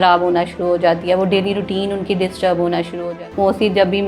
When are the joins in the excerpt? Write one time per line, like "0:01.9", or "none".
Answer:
0:03.1